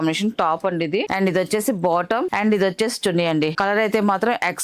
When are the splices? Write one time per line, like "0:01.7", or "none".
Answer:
0:01.1
0:02.3
0:03.6